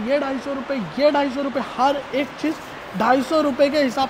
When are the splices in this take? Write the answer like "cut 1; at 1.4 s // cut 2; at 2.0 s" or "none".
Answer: none